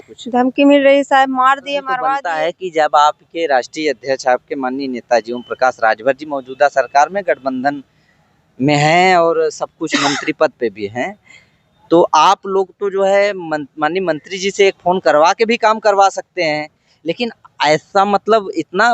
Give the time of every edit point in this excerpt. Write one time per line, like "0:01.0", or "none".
0:02.3